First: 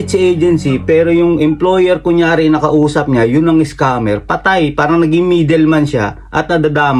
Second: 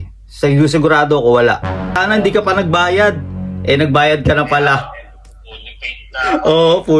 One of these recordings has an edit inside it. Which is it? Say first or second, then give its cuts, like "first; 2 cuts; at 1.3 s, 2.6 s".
second; 1 cut; at 1.9 s